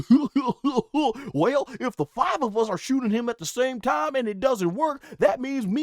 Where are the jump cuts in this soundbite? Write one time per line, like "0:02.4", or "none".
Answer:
none